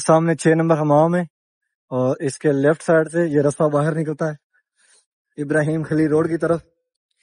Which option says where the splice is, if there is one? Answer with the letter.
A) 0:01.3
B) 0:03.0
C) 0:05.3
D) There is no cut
D